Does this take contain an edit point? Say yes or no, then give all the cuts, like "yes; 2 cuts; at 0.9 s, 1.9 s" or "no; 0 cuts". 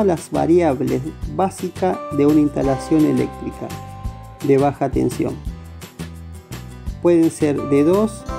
yes; 2 cuts; at 5.4 s, 7.0 s